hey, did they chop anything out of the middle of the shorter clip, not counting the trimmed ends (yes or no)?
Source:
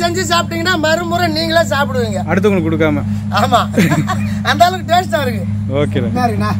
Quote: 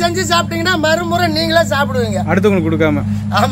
no